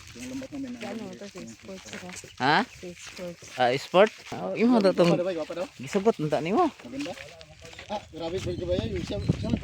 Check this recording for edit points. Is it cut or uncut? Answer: cut